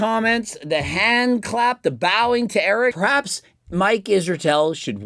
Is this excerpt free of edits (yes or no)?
no